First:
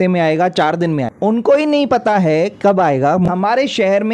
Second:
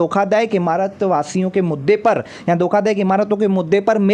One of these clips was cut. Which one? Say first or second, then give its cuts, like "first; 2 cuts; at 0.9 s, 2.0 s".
first; 2 cuts; at 1.1 s, 3.3 s